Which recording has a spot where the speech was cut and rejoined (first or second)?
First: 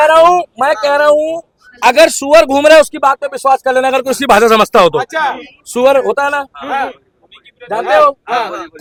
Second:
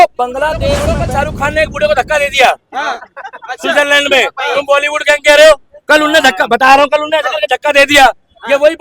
second